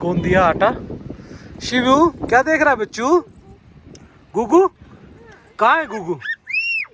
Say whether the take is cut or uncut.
uncut